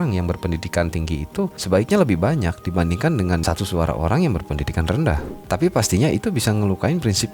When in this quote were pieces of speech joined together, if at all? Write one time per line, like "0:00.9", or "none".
0:01.6
0:05.3